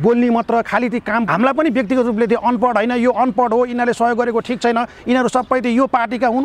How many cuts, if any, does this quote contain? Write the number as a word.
one